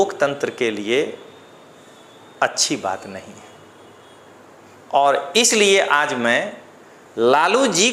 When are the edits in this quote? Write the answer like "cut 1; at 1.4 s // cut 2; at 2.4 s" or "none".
none